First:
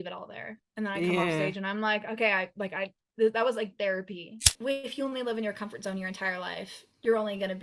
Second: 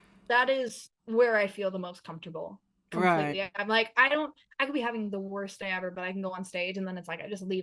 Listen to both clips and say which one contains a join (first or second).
first